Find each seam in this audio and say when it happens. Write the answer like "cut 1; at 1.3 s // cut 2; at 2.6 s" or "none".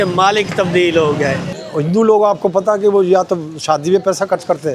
cut 1; at 1.5 s